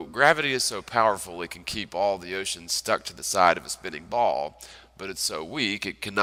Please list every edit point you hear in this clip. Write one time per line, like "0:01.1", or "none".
none